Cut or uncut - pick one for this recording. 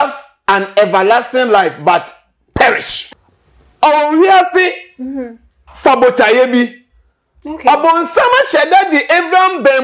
cut